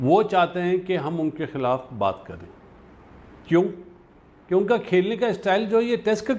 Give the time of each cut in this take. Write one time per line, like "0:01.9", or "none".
none